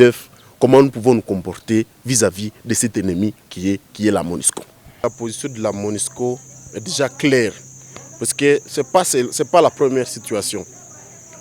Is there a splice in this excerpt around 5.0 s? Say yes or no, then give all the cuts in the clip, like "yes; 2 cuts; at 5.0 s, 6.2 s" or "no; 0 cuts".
yes; 1 cut; at 5.0 s